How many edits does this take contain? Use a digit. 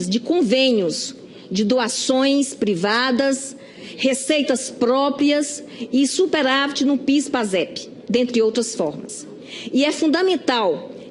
0